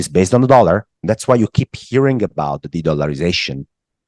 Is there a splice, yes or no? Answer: yes